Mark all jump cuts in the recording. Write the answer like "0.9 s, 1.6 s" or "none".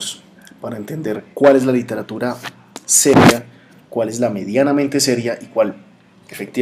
none